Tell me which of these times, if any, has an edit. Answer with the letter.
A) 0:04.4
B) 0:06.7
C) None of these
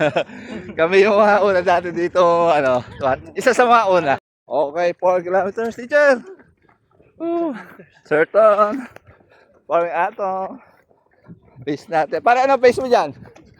A